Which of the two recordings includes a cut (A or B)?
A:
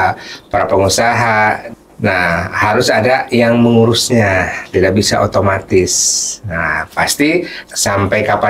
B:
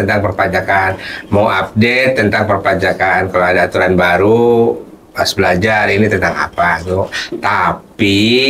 A